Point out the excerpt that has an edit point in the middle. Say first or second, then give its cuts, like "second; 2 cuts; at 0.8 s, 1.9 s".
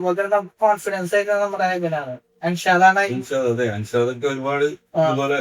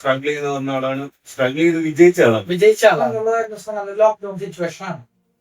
second; 1 cut; at 3.1 s